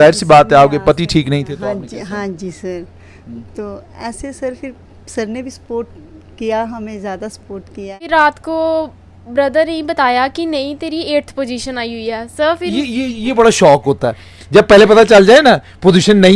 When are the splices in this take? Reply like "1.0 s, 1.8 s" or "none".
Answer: 8.1 s